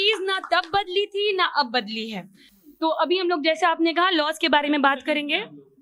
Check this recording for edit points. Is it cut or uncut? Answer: uncut